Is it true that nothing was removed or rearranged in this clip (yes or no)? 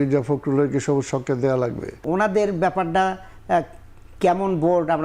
no